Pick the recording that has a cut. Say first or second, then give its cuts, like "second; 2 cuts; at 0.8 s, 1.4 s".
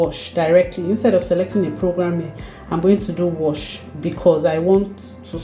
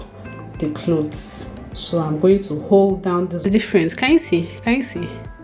second; 1 cut; at 3.5 s